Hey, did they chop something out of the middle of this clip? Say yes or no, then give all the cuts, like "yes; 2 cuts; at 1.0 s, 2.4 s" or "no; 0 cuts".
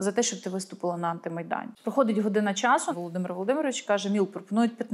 yes; 2 cuts; at 1.7 s, 2.9 s